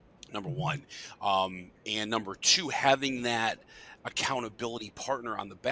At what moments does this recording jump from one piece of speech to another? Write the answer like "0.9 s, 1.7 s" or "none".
none